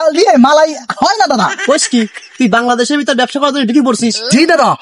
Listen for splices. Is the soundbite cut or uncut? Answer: cut